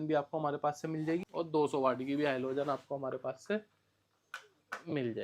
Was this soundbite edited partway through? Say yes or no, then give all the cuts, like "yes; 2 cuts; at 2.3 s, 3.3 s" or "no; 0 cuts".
yes; 1 cut; at 1.2 s